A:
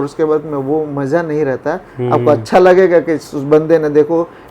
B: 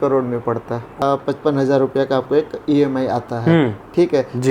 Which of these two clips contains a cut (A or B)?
B